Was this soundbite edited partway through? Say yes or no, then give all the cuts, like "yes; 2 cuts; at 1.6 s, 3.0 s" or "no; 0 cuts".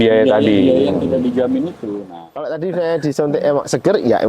yes; 1 cut; at 1.9 s